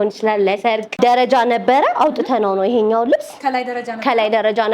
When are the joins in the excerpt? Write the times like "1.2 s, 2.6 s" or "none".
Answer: 1.0 s